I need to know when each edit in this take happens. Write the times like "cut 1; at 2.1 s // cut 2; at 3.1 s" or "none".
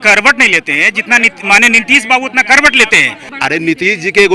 cut 1; at 3.2 s